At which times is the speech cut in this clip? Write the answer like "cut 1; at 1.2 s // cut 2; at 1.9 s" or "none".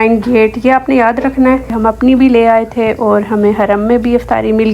cut 1; at 1.7 s